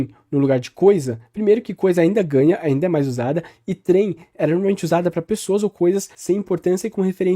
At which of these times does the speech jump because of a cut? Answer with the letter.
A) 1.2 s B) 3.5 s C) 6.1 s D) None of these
C